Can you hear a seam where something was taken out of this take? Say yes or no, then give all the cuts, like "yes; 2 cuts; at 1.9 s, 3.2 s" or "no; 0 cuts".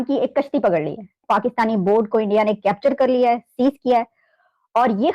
yes; 1 cut; at 1.2 s